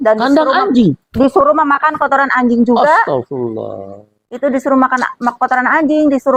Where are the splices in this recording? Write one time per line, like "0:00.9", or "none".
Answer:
none